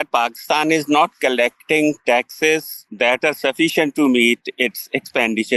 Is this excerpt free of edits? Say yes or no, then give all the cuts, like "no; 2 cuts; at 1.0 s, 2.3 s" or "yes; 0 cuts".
yes; 0 cuts